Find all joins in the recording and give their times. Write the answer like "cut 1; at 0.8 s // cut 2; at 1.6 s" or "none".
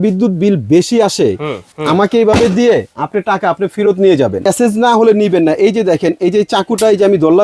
cut 1; at 1.7 s // cut 2; at 4.4 s